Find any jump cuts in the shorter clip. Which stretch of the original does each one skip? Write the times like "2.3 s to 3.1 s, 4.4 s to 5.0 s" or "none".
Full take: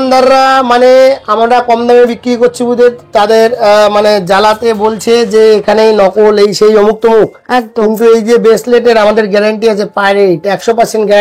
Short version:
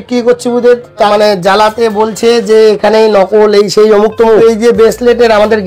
3.2 s to 3.9 s, 7.2 s to 8.1 s